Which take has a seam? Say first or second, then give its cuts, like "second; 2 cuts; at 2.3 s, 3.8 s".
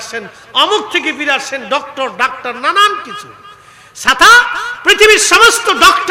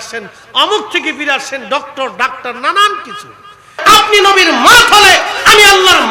second; 1 cut; at 3.7 s